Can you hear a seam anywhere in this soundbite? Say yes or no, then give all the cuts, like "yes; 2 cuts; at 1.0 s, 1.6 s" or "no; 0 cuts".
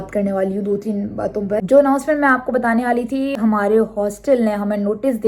yes; 2 cuts; at 1.6 s, 3.4 s